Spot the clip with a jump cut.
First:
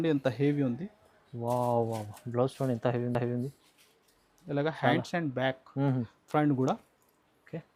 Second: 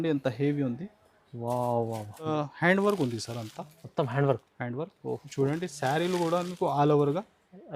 second; 1 cut; at 2.3 s

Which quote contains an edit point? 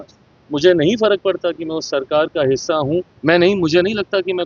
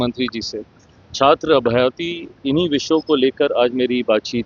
first; 1 cut; at 3.1 s

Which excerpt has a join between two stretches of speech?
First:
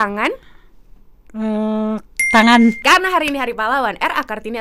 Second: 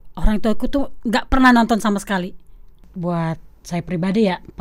second; 1 cut; at 2.9 s

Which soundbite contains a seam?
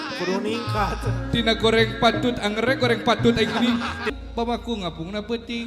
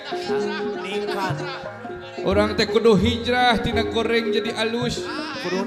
first; 1 cut; at 4.1 s

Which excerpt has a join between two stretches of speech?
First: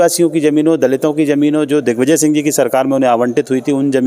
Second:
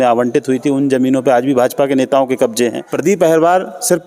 second; 1 cut; at 2.9 s

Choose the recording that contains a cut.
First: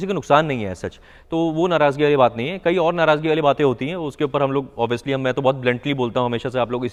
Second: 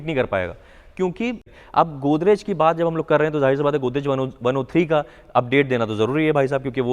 second; 1 cut; at 1.6 s

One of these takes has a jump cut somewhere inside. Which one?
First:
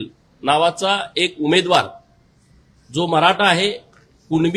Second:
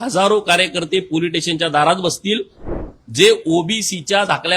second; 1 cut; at 2.7 s

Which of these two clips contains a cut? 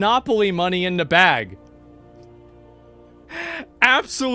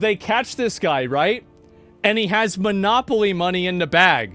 first; 1 cut; at 3.2 s

